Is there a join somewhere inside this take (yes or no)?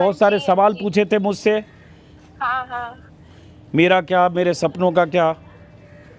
no